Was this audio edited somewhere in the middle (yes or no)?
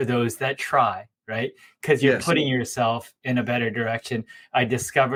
no